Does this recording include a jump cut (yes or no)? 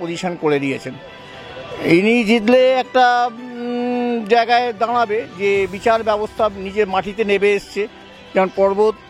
no